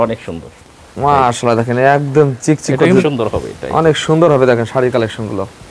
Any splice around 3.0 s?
yes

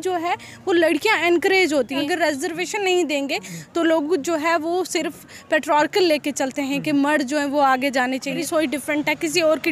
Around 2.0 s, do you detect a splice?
yes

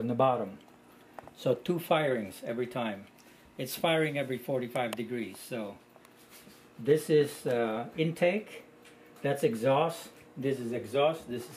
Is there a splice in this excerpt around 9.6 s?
yes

